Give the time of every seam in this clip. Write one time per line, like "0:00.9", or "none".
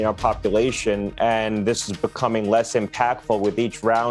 none